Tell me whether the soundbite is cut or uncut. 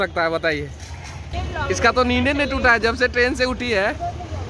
cut